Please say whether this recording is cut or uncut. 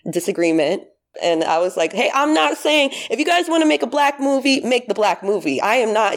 cut